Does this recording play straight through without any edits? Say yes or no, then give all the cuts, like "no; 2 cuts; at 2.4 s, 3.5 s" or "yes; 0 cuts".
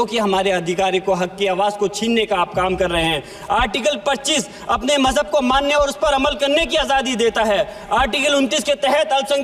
yes; 0 cuts